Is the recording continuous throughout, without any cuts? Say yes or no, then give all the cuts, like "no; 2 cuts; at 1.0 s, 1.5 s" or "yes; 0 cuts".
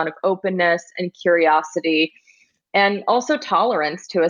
yes; 0 cuts